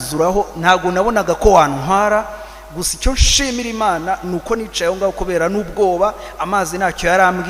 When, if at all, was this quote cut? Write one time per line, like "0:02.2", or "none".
none